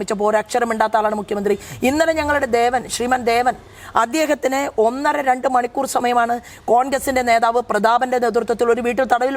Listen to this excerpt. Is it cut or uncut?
uncut